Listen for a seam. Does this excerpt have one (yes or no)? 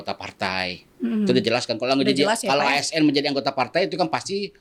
no